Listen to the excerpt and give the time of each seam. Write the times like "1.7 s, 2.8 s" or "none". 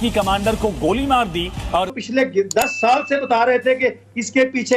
1.9 s